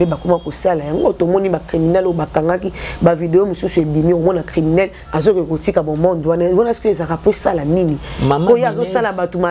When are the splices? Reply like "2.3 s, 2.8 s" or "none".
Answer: none

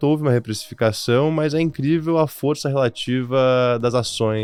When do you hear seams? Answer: none

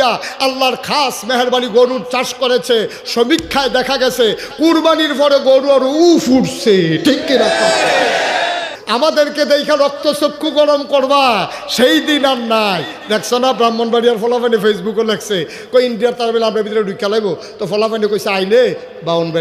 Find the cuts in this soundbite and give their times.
8.8 s

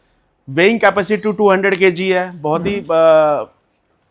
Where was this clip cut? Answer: none

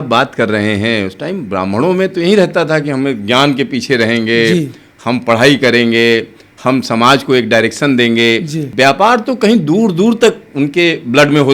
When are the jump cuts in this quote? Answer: 8.6 s

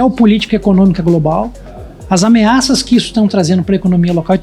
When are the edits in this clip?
none

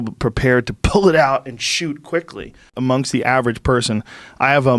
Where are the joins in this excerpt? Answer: 2.8 s

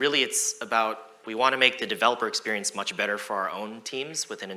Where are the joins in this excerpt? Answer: 1.2 s

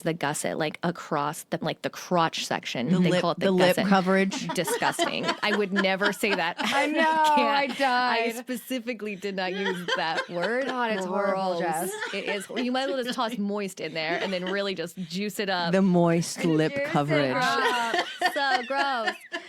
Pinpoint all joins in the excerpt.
1.6 s

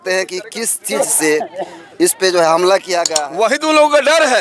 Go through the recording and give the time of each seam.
3.1 s

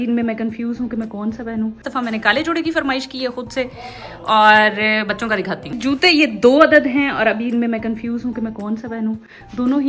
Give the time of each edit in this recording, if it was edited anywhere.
none

